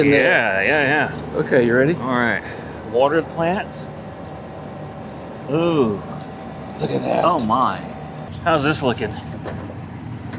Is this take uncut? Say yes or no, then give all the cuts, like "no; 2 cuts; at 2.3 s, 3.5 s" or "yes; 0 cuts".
no; 1 cut; at 8.2 s